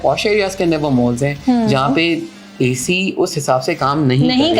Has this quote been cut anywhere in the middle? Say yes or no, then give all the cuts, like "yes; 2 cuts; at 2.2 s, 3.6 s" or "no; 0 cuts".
no; 0 cuts